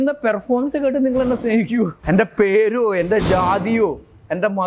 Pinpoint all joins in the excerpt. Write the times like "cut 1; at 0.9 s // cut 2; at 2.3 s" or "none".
cut 1; at 2.0 s